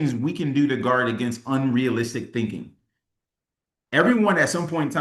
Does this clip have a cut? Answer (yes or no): no